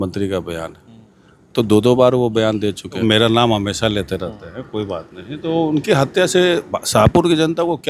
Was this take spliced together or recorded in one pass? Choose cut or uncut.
cut